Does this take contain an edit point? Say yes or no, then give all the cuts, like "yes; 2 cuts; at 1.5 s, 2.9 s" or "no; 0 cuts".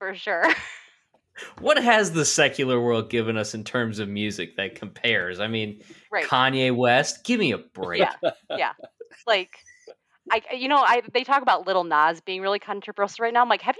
no; 0 cuts